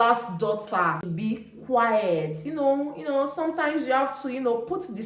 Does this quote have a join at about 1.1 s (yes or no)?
yes